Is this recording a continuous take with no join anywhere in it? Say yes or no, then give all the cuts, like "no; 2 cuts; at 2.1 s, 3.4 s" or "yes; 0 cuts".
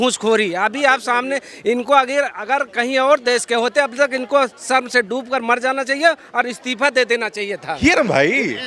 no; 1 cut; at 7.8 s